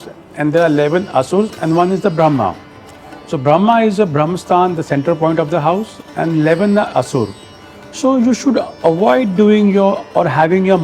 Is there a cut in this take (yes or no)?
no